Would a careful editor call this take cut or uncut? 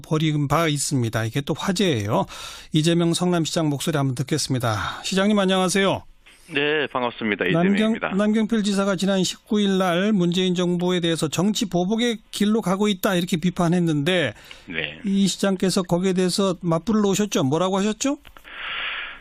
uncut